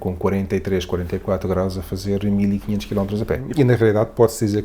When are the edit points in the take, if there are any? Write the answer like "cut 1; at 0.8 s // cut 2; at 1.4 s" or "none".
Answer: cut 1; at 3.4 s